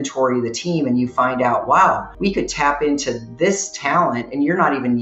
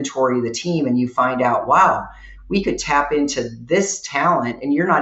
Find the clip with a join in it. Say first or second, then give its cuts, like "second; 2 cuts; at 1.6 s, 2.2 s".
first; 1 cut; at 2.1 s